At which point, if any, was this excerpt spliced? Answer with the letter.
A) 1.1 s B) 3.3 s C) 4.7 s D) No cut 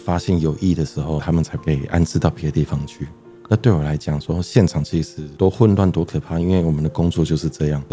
A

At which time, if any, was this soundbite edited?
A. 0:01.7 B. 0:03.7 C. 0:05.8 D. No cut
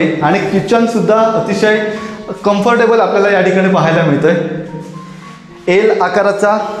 D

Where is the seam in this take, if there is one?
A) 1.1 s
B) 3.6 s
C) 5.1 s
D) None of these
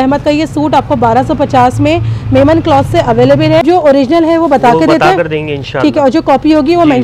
B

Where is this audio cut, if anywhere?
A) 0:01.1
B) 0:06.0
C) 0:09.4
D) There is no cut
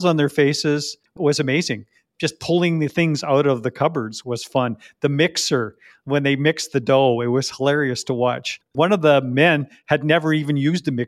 A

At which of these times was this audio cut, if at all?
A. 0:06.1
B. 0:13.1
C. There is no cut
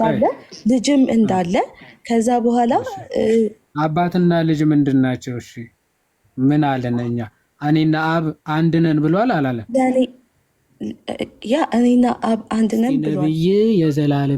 B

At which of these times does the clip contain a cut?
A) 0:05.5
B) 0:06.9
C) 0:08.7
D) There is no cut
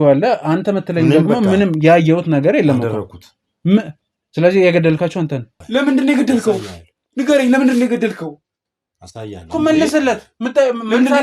A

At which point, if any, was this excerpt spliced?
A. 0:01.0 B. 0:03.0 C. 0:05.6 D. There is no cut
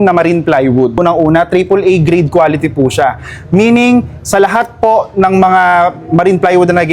A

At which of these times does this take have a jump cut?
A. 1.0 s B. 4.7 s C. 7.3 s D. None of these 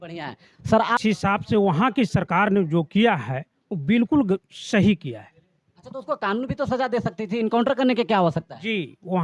A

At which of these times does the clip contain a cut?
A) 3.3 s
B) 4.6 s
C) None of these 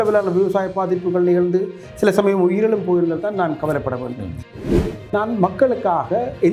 B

